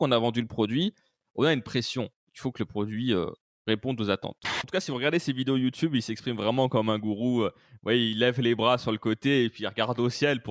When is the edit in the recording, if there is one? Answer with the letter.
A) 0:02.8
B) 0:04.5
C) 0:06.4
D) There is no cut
B